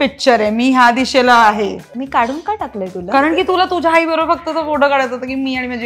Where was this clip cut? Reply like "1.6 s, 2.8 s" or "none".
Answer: 1.9 s